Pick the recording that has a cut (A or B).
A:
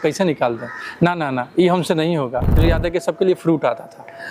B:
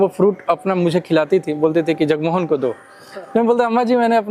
A